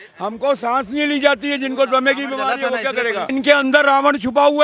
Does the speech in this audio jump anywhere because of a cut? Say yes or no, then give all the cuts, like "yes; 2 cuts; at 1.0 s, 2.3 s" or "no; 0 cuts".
yes; 1 cut; at 3.3 s